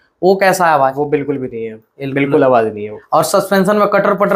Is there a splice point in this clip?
no; 0 cuts

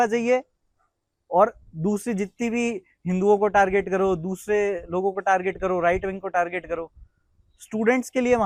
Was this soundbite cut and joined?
no; 0 cuts

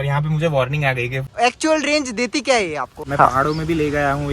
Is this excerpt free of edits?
no; 2 cuts; at 1.2 s, 3.0 s

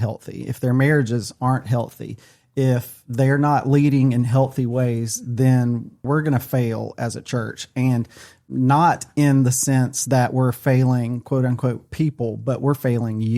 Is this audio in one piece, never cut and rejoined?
no; 2 cuts; at 6.0 s, 8.4 s

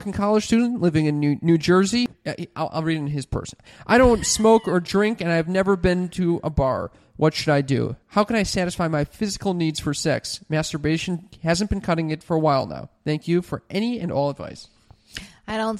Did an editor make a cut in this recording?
yes; 2 cuts; at 2.1 s, 3.6 s

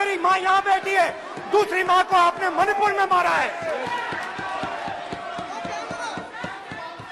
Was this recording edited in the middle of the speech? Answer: no; 0 cuts

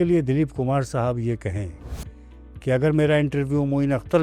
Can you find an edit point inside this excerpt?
no; 0 cuts

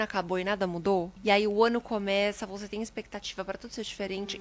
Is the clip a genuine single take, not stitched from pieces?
no; 1 cut; at 1.1 s

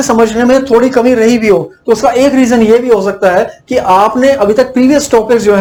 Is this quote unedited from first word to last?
yes; 0 cuts

